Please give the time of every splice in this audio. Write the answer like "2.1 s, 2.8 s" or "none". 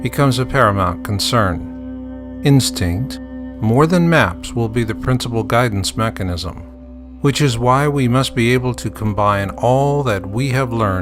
4.0 s